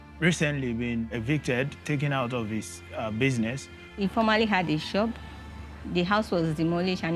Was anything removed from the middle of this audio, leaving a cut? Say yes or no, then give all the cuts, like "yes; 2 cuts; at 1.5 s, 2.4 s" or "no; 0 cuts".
yes; 2 cuts; at 1.1 s, 4.0 s